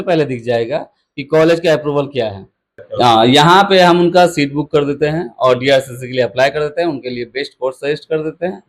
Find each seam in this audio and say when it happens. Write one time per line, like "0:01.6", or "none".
0:02.8